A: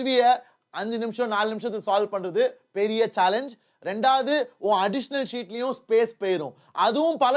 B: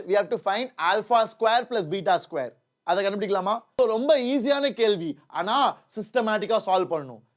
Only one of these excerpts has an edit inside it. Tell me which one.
B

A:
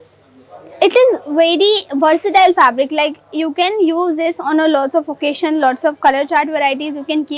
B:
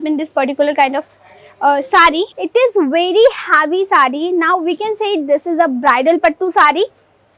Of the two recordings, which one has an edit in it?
B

